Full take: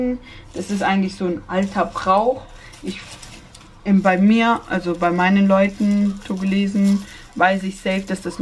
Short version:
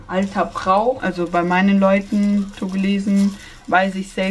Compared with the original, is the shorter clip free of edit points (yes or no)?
no